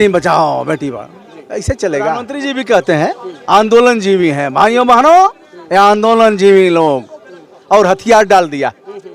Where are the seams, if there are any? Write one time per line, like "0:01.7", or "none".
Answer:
0:02.3